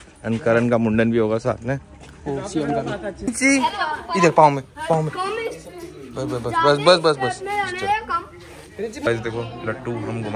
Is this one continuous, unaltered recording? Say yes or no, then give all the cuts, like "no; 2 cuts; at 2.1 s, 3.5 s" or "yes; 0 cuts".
yes; 0 cuts